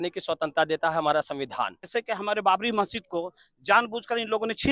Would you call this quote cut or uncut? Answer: cut